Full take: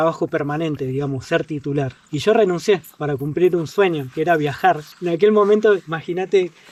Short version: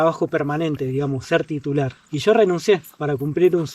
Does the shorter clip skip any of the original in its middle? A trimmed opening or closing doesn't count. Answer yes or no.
no